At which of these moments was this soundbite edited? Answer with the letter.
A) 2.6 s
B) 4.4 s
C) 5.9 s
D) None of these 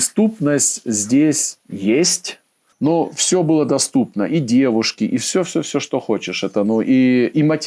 A